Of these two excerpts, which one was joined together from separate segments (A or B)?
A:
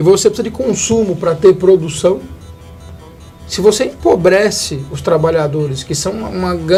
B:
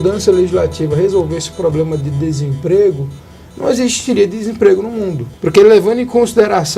B